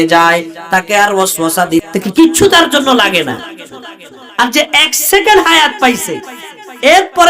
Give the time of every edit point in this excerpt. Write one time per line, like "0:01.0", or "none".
0:01.8

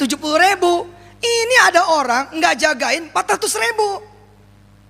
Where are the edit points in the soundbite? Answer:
none

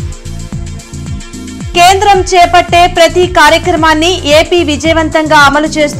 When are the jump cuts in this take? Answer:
0:01.0

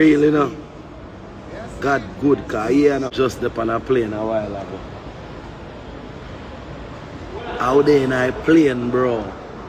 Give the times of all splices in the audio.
0:03.1

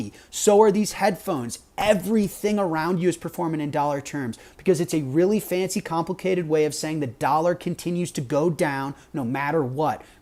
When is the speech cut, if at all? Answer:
none

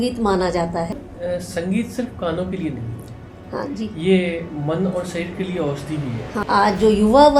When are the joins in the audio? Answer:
0:01.1
0:06.4

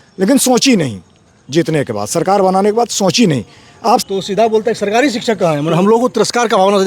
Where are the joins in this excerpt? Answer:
0:04.0

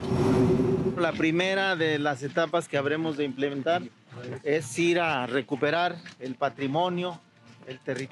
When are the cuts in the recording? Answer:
0:01.0

